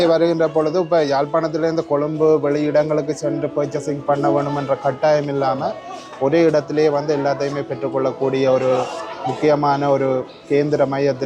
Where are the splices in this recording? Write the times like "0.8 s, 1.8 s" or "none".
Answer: none